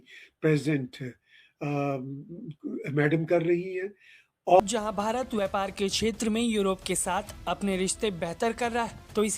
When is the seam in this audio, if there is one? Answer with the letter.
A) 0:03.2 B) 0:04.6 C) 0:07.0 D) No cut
B